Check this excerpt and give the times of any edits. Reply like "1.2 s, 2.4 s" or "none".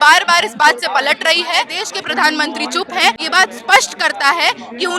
1.8 s, 3.2 s